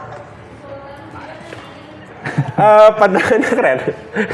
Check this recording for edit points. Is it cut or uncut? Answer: uncut